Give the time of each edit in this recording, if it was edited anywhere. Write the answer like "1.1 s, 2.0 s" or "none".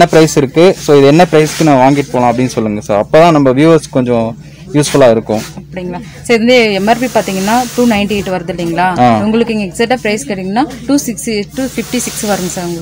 none